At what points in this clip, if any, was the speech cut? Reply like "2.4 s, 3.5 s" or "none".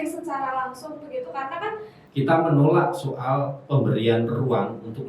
2.0 s